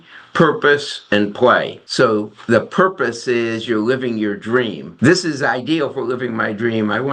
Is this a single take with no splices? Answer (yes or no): no